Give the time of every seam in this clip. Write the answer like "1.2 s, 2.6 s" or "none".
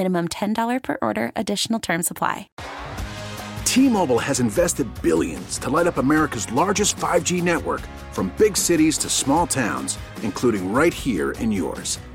2.5 s